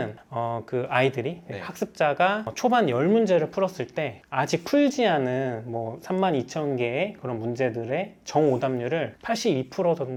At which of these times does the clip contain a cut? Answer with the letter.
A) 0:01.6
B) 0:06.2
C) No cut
C